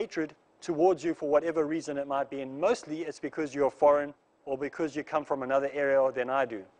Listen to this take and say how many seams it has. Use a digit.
1